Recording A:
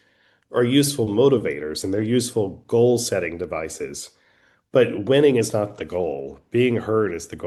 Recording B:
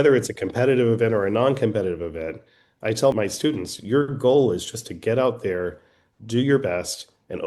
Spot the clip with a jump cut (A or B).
B